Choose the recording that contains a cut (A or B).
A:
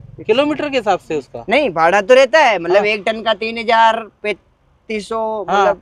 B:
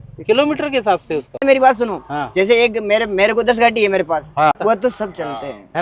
B